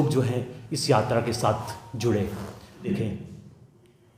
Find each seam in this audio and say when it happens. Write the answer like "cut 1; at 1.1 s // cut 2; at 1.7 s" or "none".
cut 1; at 2.9 s